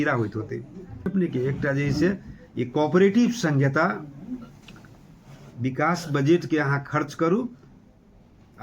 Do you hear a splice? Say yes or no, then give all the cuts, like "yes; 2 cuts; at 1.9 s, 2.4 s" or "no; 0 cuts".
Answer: yes; 1 cut; at 1.1 s